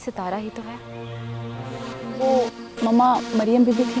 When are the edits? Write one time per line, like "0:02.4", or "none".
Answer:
0:02.0